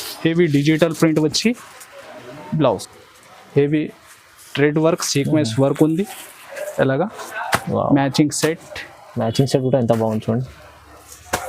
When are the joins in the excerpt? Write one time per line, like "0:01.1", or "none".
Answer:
0:02.9